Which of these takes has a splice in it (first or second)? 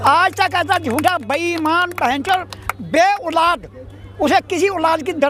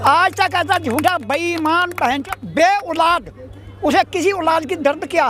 second